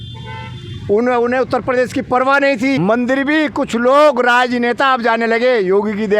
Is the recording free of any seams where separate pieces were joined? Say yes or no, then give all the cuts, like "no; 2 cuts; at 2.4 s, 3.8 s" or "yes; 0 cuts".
no; 1 cut; at 2.8 s